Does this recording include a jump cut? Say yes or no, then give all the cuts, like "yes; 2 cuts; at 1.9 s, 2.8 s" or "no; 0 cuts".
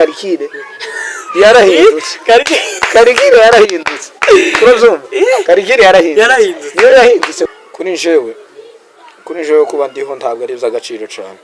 yes; 1 cut; at 7.5 s